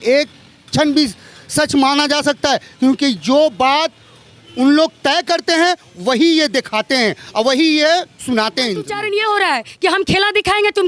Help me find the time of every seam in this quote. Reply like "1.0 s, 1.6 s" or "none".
9.0 s